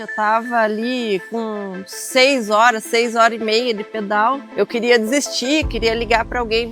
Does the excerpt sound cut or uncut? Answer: cut